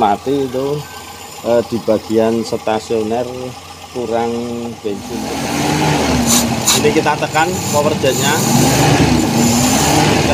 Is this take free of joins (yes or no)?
no